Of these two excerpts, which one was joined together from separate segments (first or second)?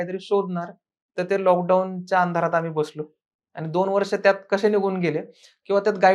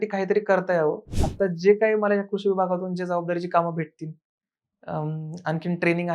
second